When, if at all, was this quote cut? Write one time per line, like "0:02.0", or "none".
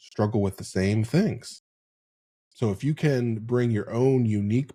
none